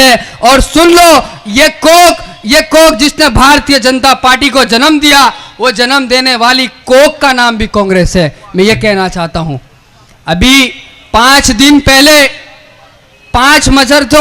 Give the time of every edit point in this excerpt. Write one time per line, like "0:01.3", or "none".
none